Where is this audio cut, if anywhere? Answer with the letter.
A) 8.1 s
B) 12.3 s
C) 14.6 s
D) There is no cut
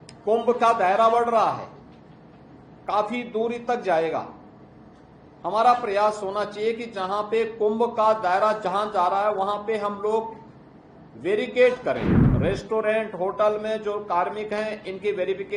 B